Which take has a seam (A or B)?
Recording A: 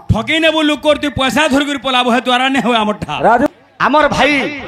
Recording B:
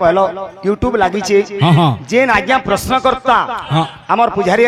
A